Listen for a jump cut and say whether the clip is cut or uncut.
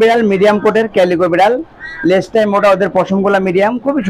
uncut